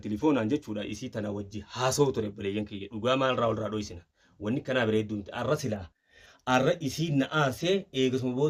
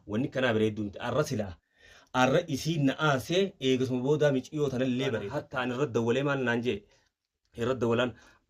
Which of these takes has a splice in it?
second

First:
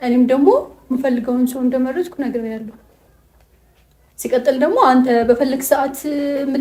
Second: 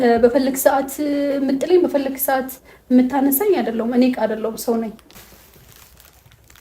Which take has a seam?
second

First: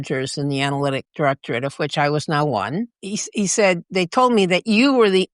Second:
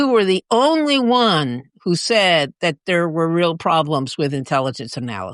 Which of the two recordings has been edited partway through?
first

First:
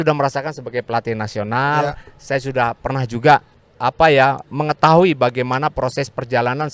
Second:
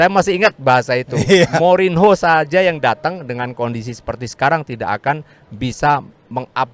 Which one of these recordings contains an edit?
first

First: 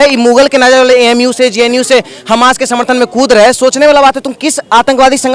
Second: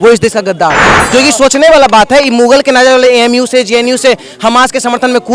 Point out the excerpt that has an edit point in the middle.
second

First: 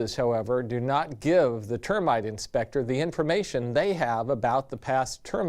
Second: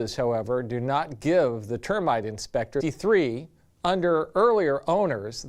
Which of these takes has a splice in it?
first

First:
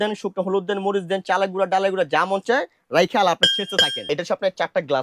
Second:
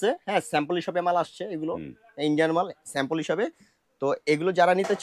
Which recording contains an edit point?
first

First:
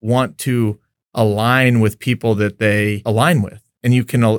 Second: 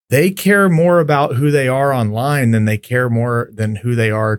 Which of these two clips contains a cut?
first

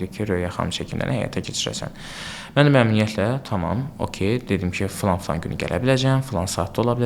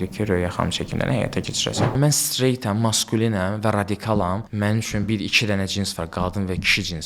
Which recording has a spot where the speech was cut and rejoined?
second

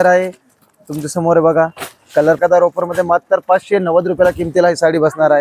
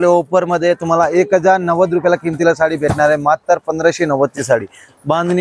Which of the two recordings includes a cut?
first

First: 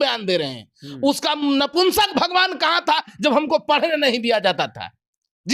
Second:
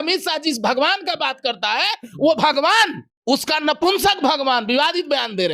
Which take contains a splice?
second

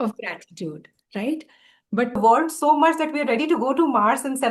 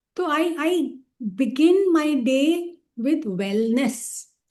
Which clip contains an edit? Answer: first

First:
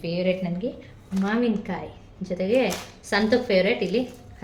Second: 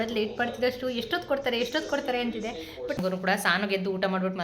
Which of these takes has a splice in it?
second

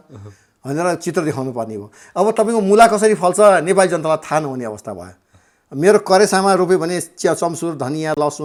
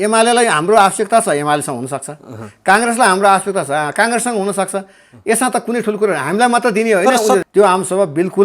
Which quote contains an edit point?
second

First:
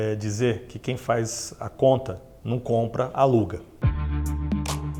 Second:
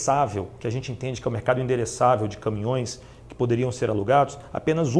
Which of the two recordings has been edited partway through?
first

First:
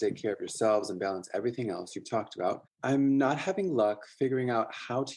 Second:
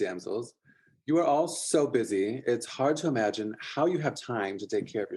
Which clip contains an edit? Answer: first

